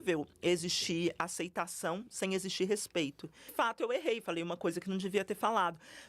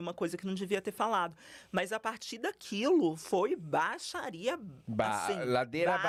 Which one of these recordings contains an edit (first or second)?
first